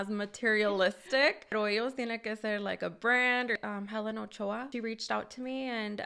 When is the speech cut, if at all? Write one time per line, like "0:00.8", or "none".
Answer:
0:01.5
0:03.6
0:04.7